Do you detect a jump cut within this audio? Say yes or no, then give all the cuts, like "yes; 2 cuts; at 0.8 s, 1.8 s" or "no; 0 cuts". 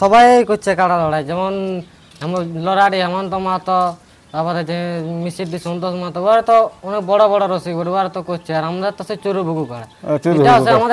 no; 0 cuts